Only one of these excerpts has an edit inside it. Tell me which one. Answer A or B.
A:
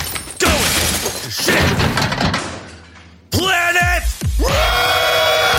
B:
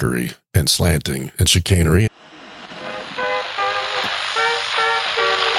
B